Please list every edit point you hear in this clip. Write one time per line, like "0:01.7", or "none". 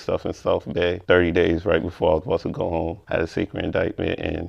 0:03.0